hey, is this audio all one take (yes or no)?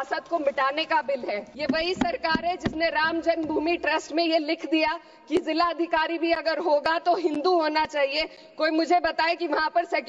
no